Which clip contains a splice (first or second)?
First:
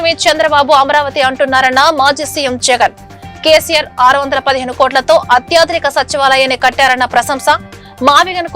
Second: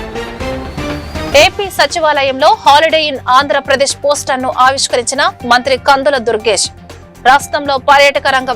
second